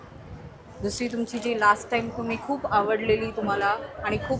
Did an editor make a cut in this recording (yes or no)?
no